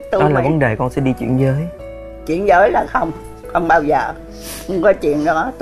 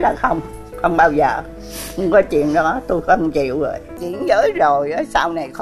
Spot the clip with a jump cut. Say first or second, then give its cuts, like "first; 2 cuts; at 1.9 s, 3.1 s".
second; 1 cut; at 4.1 s